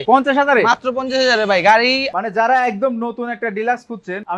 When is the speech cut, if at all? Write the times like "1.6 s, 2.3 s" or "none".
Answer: 2.0 s